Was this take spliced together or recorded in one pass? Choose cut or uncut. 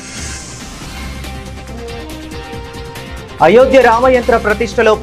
cut